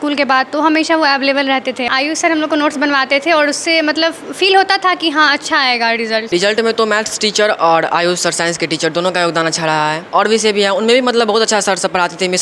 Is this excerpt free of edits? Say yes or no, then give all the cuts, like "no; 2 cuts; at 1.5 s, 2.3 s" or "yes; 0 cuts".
no; 3 cuts; at 1.9 s, 6.3 s, 10.0 s